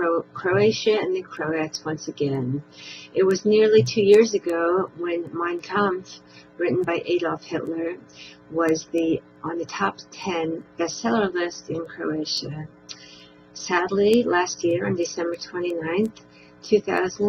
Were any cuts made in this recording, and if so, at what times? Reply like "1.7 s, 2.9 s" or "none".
3.2 s

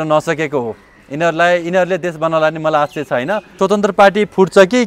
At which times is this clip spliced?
3.5 s

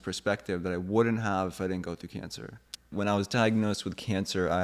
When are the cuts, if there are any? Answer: 2.9 s

